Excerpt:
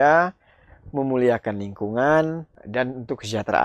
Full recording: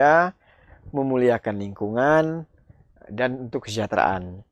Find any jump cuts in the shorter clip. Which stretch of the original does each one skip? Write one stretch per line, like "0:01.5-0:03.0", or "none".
0:02.5-0:03.0